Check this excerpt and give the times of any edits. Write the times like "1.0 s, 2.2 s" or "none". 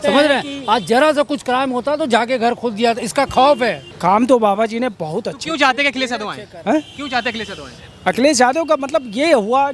3.9 s